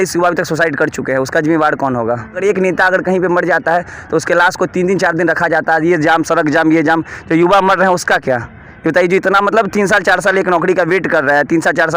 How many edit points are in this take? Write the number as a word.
one